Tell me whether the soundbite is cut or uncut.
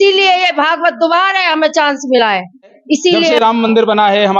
cut